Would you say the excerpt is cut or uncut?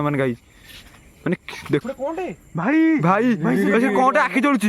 cut